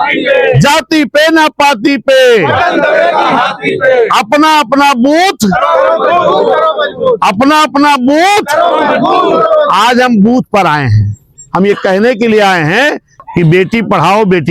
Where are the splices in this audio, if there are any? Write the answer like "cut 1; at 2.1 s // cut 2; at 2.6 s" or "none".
cut 1; at 13.1 s